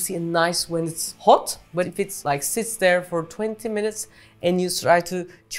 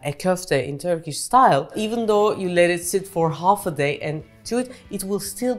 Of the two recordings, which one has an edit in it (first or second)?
first